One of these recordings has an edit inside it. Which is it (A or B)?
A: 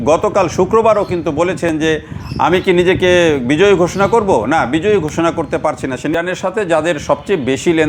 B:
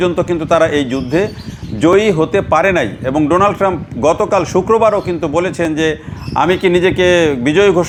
A